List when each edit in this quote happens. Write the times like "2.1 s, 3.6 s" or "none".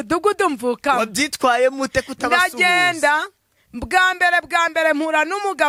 none